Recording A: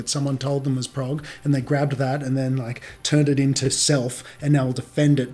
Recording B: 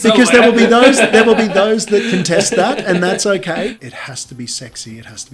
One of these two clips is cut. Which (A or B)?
B